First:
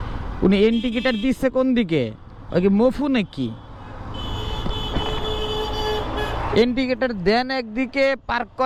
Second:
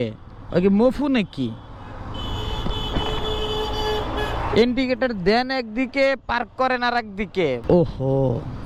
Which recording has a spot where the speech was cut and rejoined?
second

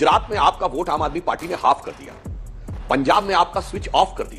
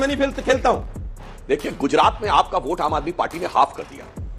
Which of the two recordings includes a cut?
second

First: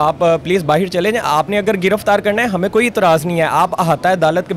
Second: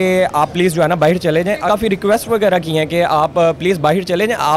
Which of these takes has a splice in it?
second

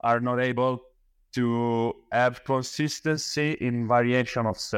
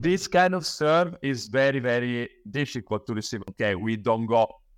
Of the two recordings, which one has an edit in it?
second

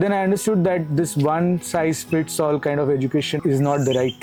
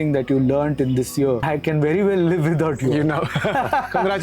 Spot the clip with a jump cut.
second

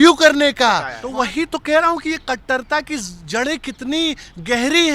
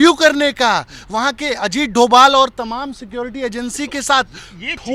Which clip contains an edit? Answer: first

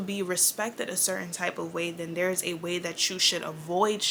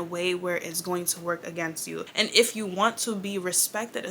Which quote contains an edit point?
second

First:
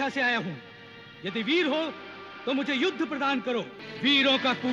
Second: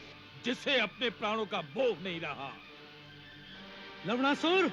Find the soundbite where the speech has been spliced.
first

